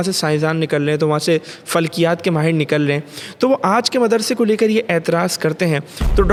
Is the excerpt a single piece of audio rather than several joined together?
yes; 0 cuts

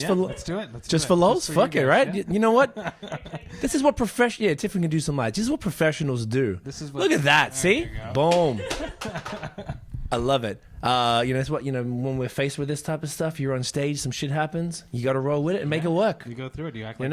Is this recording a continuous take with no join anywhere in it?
yes; 0 cuts

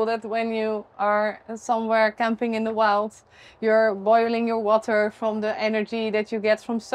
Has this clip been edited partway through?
no; 0 cuts

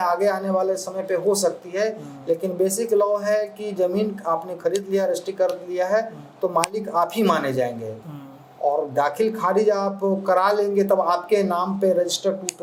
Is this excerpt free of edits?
yes; 0 cuts

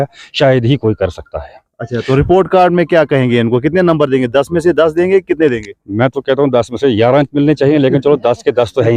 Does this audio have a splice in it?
no; 0 cuts

